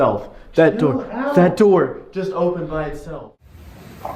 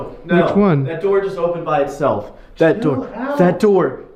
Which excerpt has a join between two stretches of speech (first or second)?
first